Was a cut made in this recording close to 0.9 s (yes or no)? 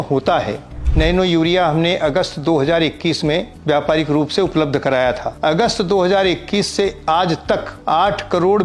yes